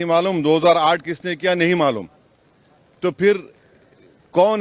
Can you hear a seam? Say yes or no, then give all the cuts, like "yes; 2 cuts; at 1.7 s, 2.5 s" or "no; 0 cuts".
no; 0 cuts